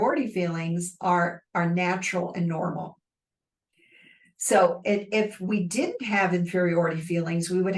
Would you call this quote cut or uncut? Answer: uncut